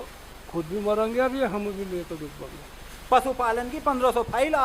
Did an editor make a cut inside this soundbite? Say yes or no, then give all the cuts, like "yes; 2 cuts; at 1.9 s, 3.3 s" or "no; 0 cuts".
yes; 1 cut; at 2.9 s